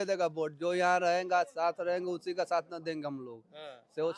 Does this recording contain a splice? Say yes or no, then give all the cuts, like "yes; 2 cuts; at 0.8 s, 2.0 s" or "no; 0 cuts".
no; 0 cuts